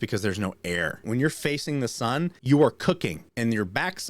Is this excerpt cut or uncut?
cut